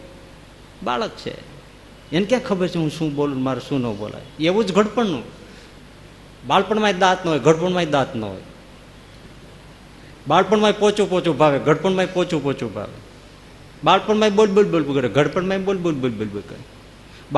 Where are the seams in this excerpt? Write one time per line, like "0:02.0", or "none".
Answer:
none